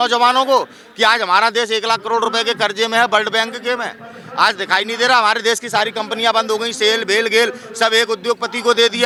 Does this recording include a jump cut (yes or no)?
no